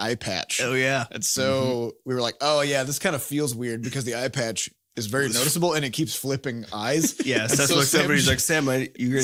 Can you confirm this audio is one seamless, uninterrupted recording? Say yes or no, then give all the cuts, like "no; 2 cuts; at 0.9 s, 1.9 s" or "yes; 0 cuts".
yes; 0 cuts